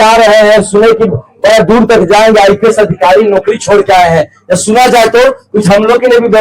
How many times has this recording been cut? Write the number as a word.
zero